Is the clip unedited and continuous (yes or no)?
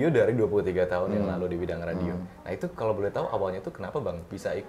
yes